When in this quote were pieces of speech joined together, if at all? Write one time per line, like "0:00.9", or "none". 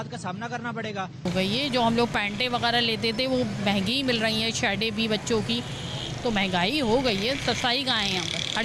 none